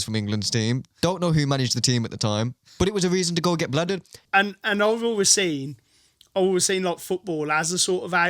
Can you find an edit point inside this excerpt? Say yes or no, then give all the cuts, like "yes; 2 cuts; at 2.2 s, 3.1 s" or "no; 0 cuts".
yes; 1 cut; at 4.1 s